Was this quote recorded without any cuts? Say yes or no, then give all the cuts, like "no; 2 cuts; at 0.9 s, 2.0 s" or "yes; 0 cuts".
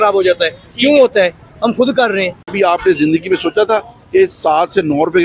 no; 1 cut; at 2.5 s